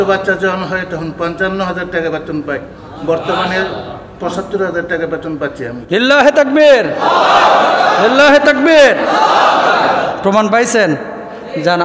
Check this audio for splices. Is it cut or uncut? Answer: uncut